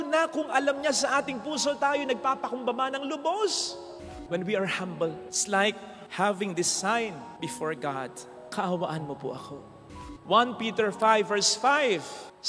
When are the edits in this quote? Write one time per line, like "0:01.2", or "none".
0:04.1
0:10.0

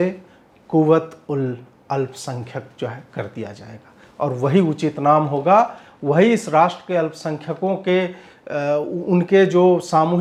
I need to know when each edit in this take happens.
none

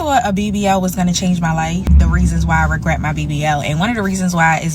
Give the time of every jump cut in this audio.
0:01.9

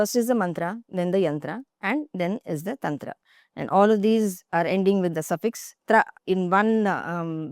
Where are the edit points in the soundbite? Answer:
0:06.2

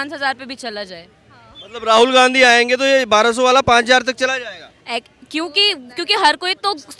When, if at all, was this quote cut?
none

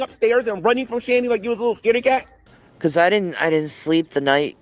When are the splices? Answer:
0:02.7

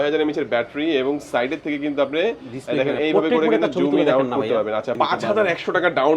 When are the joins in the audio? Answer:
0:04.9

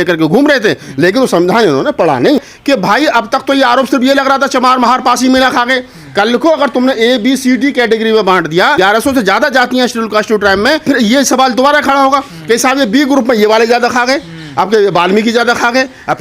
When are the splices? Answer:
0:02.5

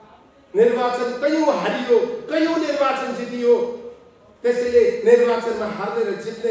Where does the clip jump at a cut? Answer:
none

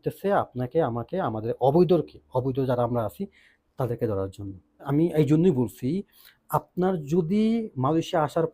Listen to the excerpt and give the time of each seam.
0:04.9

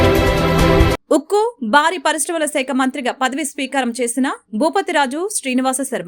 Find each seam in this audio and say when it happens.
0:00.9

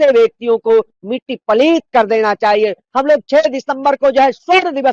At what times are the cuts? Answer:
0:02.8

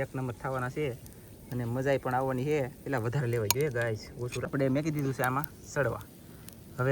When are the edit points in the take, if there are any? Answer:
0:04.5

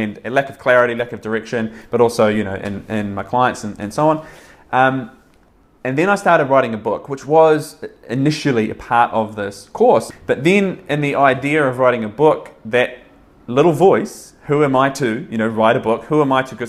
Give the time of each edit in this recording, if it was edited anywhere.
0:10.1

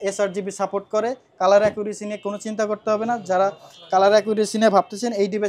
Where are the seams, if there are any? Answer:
none

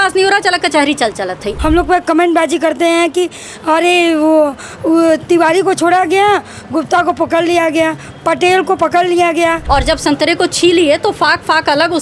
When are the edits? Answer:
0:01.4
0:09.6

